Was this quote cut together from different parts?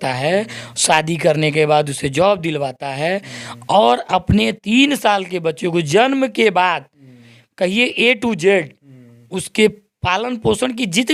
no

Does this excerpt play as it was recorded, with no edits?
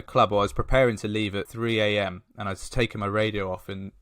no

